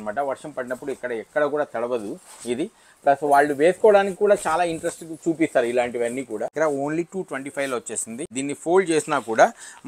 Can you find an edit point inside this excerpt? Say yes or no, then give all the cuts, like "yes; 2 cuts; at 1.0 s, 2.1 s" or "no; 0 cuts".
yes; 2 cuts; at 6.5 s, 8.3 s